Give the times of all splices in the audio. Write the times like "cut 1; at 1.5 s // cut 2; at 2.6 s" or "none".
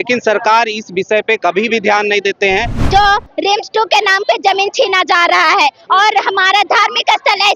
cut 1; at 2.8 s